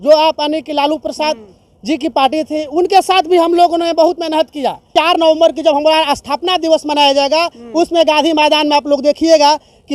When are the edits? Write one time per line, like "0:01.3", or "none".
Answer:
0:04.9